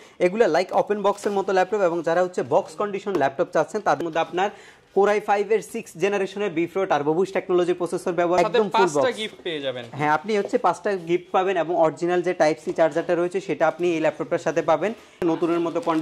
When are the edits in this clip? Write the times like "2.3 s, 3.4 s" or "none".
4.0 s, 8.4 s, 15.2 s